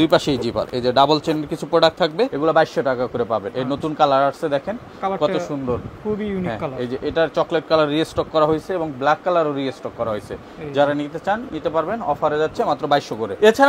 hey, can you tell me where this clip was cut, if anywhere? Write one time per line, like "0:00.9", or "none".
none